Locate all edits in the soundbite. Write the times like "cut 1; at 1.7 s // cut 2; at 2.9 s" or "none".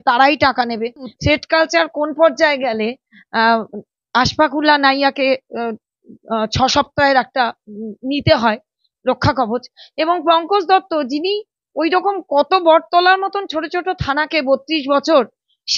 cut 1; at 1.1 s